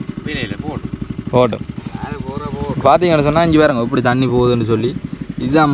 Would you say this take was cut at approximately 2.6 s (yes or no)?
yes